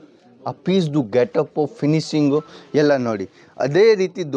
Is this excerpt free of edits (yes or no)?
yes